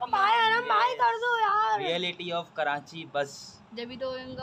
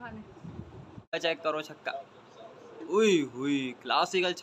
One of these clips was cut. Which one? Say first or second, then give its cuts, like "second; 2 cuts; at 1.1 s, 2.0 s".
second; 1 cut; at 1.1 s